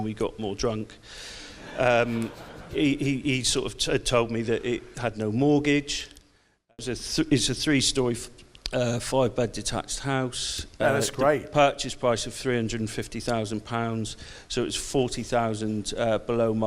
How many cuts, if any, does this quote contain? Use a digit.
1